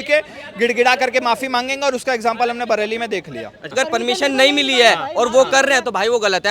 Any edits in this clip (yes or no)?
yes